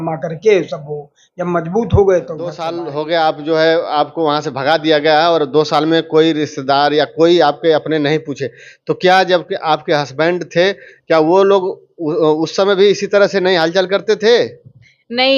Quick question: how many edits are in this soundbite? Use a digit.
1